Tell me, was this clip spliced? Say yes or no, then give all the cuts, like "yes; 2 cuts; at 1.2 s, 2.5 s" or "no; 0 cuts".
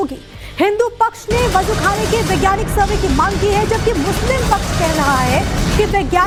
no; 0 cuts